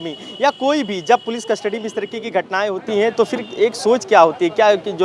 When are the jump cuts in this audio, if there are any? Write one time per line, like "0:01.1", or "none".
none